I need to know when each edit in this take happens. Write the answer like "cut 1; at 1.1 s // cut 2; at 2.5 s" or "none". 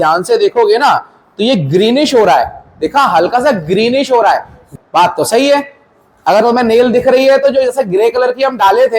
cut 1; at 4.7 s